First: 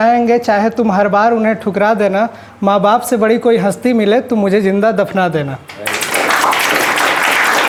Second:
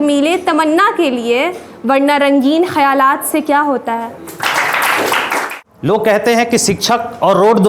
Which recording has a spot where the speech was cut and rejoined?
second; 1 cut; at 5.3 s

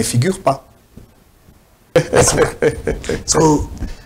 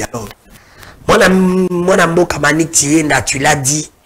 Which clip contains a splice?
first; 1 cut; at 2.0 s

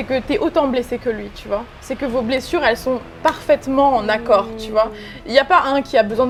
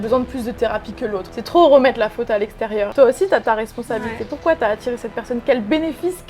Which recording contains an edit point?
second; 2 cuts; at 1.3 s, 2.9 s

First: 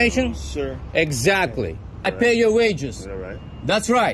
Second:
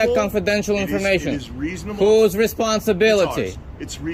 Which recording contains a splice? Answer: first; 1 cut; at 2.2 s

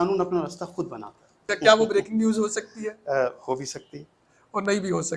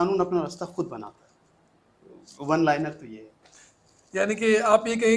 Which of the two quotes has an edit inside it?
first; 1 cut; at 1.5 s

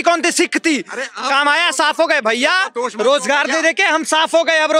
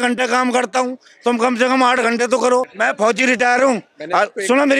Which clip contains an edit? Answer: second; 1 cut; at 2.7 s

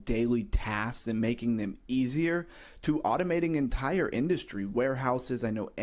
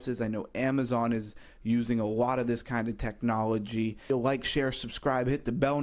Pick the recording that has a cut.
second; 1 cut; at 4.1 s

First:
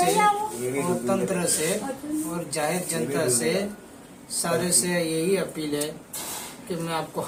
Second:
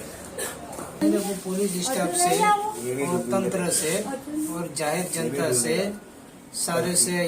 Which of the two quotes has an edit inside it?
second; 1 cut; at 1.0 s

